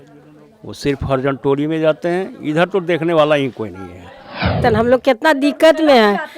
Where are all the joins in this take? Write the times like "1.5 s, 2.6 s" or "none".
4.6 s